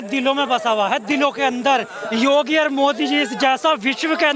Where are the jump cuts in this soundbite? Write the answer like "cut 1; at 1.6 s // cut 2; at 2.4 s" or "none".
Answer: none